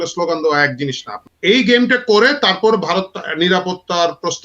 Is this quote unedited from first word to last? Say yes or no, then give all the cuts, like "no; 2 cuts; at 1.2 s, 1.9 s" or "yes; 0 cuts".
no; 1 cut; at 1.1 s